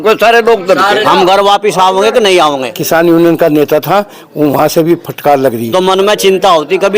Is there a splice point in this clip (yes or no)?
yes